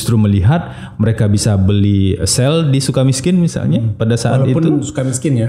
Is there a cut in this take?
no; 0 cuts

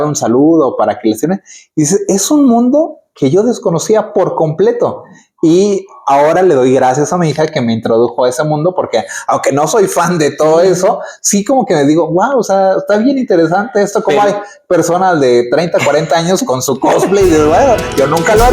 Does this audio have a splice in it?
no; 0 cuts

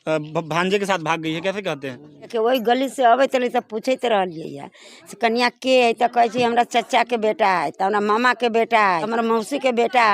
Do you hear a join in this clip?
yes; 2 cuts; at 2.3 s, 9.1 s

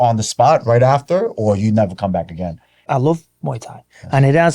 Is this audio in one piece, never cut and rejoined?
no; 1 cut; at 2.7 s

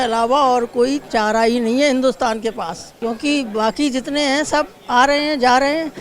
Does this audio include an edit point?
yes; 1 cut; at 2.8 s

